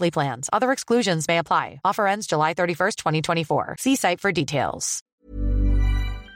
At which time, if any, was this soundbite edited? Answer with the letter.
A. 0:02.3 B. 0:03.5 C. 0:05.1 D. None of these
C